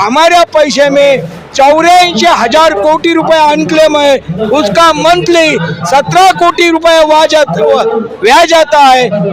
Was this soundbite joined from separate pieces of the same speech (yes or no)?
no